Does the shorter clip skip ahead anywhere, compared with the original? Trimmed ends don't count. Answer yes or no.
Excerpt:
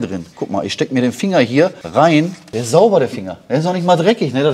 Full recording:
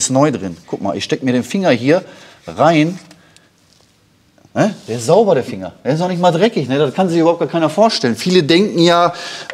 yes